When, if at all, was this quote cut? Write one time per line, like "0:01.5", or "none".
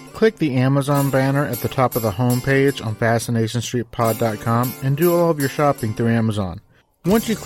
none

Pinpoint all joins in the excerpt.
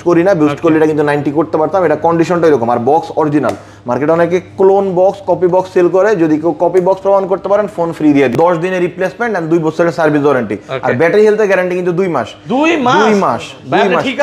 0:08.3

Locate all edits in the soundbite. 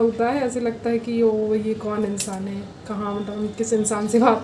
none

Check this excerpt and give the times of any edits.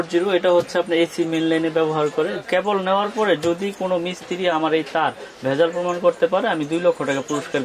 0:02.4
0:04.6

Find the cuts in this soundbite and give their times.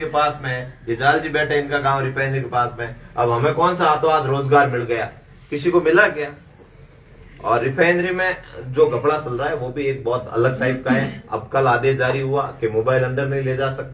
none

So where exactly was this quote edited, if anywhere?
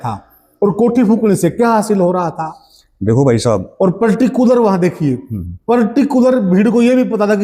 none

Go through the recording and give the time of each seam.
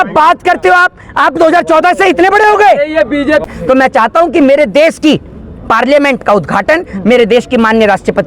0:03.4

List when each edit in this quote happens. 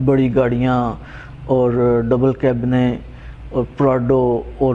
none

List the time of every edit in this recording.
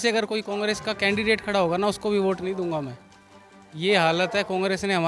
none

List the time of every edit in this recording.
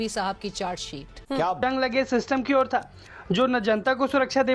0:01.6

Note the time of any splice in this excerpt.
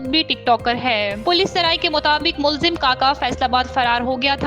none

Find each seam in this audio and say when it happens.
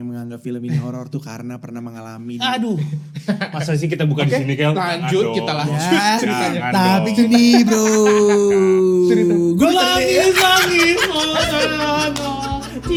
none

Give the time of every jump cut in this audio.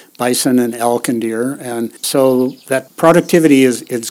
0:02.0
0:02.7

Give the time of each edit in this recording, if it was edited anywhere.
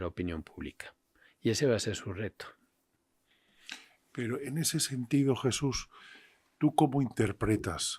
none

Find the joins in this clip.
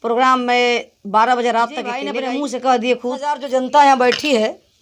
0:02.1
0:03.5

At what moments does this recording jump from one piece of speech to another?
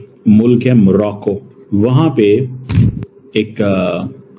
0:01.5

